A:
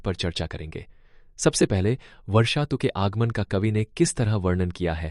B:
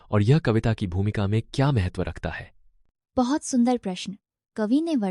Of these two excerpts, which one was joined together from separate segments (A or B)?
B